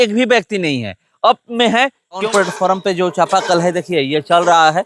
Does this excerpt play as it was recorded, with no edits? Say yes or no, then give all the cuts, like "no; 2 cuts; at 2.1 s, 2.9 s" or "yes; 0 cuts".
no; 1 cut; at 2.2 s